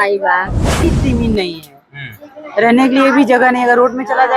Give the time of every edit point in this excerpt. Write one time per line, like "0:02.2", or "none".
0:00.9